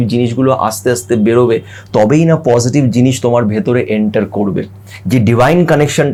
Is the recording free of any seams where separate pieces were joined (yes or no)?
yes